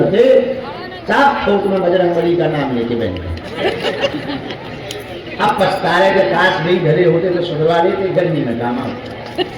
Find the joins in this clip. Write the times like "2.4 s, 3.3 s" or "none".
4.1 s